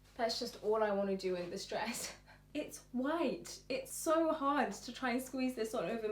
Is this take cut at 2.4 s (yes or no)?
yes